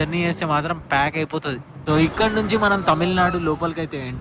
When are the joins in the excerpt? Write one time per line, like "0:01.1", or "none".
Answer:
0:01.7